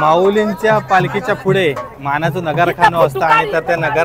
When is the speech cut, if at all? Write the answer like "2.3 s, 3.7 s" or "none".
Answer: none